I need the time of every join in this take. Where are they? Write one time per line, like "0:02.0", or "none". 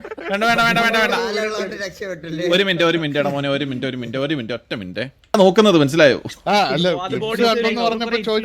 0:05.4